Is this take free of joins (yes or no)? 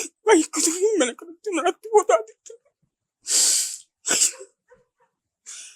yes